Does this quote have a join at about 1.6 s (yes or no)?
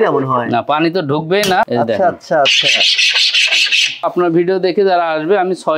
yes